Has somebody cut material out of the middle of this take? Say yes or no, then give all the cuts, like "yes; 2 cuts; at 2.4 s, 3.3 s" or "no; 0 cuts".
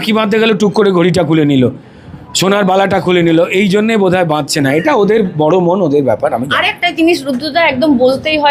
no; 0 cuts